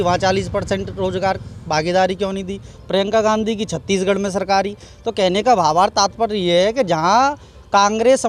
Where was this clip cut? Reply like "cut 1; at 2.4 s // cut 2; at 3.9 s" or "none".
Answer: none